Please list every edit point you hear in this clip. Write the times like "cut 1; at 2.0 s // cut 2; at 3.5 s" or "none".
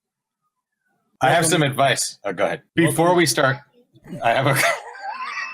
cut 1; at 2.6 s